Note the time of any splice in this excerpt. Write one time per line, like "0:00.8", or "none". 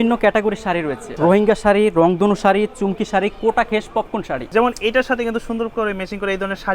0:01.0
0:04.4